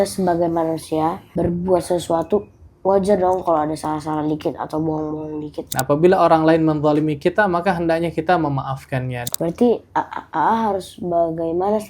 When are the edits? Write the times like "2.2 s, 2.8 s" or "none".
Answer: 1.2 s, 5.8 s, 9.2 s